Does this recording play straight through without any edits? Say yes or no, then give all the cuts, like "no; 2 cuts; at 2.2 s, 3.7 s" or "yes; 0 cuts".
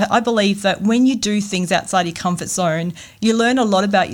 yes; 0 cuts